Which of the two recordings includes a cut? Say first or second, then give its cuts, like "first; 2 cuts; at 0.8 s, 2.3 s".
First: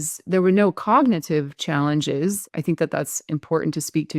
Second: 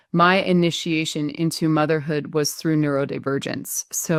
first; 1 cut; at 2.5 s